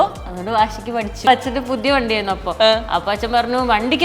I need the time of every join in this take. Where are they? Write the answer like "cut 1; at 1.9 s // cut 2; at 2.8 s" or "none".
cut 1; at 1.3 s